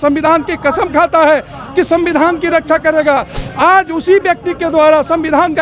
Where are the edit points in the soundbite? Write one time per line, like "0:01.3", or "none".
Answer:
none